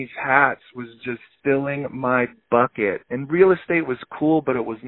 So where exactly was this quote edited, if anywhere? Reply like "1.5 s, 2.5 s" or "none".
1.2 s